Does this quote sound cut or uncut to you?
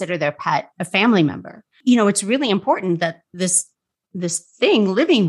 cut